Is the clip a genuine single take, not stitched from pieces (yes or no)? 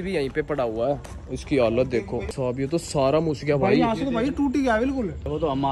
no